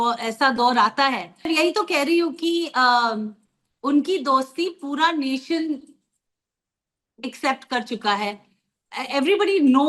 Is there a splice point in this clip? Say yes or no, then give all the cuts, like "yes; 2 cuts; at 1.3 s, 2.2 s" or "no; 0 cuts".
yes; 1 cut; at 1.5 s